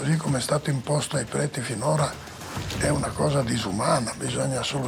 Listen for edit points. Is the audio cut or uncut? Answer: uncut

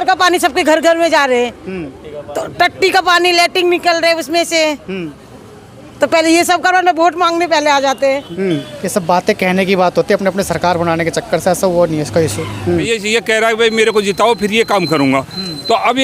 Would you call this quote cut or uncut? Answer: cut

